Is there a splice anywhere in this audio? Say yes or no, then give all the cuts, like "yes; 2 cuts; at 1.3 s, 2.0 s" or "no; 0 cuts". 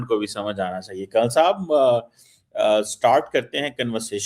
no; 0 cuts